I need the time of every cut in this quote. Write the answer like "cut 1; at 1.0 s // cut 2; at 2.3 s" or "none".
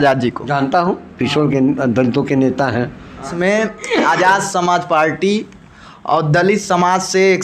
cut 1; at 3.3 s